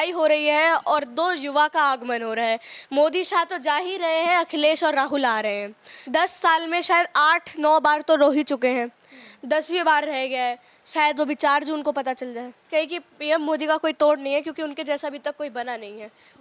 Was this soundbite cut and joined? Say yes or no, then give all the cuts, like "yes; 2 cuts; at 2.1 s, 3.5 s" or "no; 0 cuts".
yes; 2 cuts; at 5.9 s, 12.6 s